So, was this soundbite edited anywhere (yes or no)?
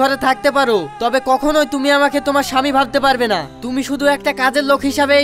no